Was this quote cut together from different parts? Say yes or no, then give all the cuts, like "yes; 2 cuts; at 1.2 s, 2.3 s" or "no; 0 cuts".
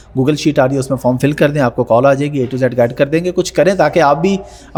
no; 0 cuts